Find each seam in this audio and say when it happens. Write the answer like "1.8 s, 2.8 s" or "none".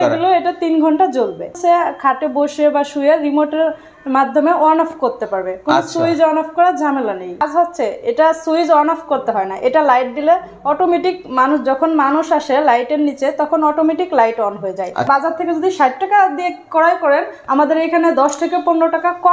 1.5 s, 7.5 s, 15.1 s